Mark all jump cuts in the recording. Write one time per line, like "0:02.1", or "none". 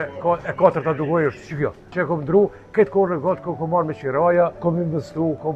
0:01.9
0:04.6